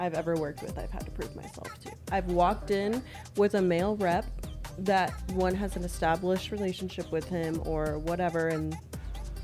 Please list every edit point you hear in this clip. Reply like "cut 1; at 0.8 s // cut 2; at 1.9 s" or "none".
none

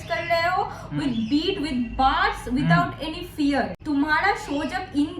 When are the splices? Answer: cut 1; at 3.8 s

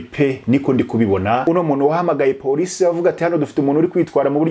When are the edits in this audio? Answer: cut 1; at 1.4 s

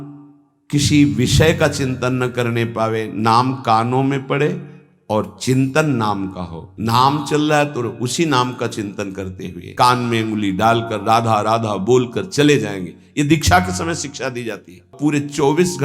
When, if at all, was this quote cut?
cut 1; at 6.7 s // cut 2; at 9.6 s // cut 3; at 14.9 s

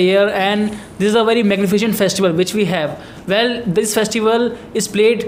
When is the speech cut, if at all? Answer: none

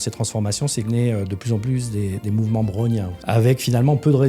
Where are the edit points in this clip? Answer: cut 1; at 0.9 s // cut 2; at 3.1 s

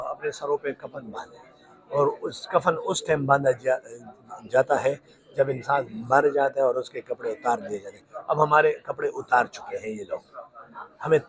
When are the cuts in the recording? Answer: none

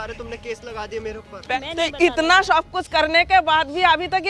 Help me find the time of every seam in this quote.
cut 1; at 1.4 s

